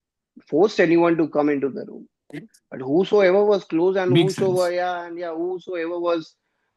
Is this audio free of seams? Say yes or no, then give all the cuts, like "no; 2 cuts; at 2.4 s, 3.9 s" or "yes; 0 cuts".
yes; 0 cuts